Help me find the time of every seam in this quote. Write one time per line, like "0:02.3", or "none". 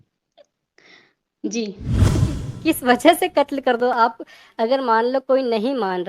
0:02.2